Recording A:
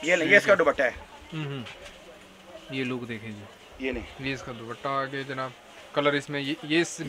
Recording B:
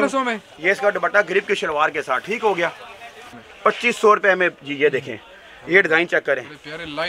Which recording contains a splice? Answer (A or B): B